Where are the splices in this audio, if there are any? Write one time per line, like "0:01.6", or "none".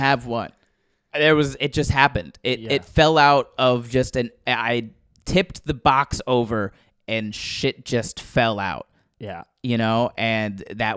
none